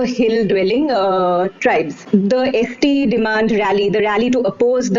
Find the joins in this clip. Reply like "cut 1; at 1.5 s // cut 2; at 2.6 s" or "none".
cut 1; at 2.0 s